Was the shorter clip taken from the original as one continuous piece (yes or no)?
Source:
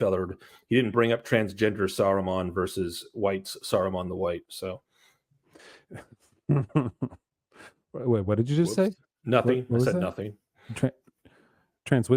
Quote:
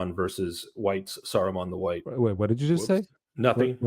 no